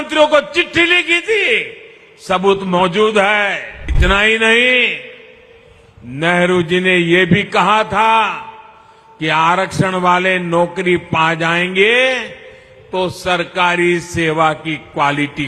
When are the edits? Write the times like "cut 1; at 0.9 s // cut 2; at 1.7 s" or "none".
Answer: cut 1; at 3.9 s

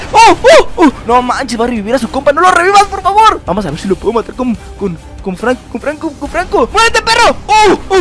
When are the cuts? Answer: cut 1; at 1.0 s // cut 2; at 3.4 s // cut 3; at 6.7 s

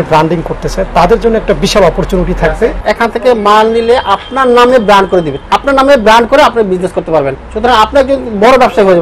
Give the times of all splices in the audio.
cut 1; at 2.8 s // cut 2; at 5.4 s

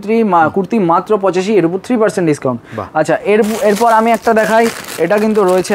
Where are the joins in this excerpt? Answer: none

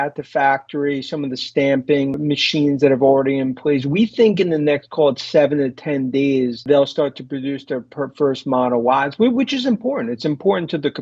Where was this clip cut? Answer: cut 1; at 2.2 s // cut 2; at 6.6 s

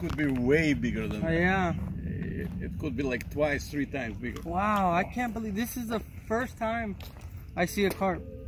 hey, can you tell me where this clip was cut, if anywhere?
cut 1; at 6.1 s

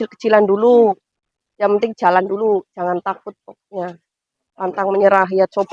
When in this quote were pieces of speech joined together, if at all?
none

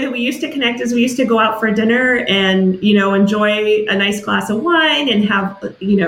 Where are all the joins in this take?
none

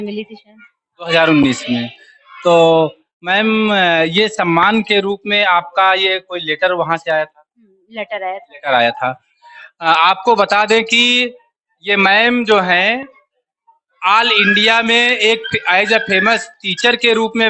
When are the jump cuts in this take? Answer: none

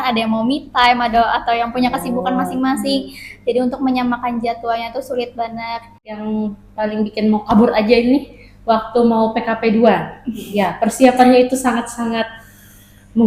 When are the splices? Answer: cut 1; at 6.2 s

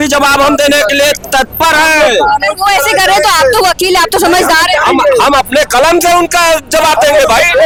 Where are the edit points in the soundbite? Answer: none

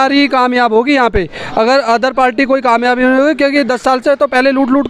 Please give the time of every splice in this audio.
none

